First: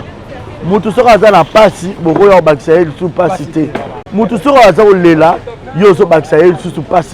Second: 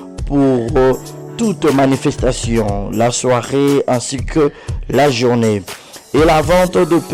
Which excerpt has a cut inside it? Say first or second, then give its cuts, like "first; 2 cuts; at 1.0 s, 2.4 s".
first; 1 cut; at 3.9 s